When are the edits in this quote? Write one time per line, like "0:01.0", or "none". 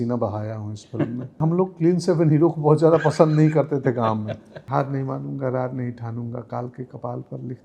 0:01.4
0:04.5